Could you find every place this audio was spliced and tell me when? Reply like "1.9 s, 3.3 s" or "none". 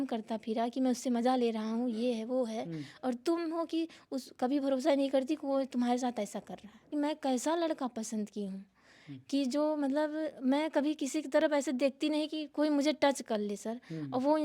6.9 s